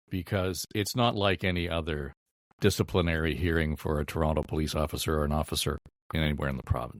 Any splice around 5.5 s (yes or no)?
no